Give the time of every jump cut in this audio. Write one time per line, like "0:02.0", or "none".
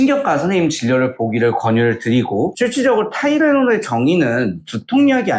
0:02.5